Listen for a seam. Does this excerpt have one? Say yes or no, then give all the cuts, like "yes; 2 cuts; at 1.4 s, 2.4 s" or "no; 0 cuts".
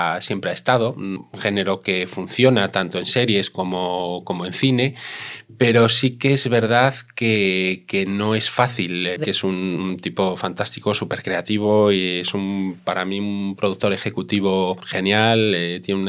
yes; 3 cuts; at 1.2 s, 9.2 s, 14.9 s